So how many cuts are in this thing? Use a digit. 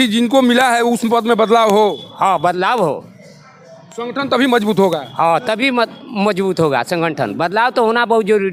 0